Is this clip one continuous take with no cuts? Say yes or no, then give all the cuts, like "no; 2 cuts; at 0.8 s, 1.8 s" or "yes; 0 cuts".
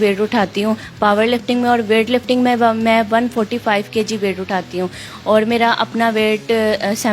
yes; 0 cuts